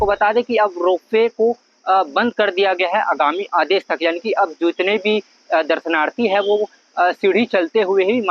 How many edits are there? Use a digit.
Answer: 0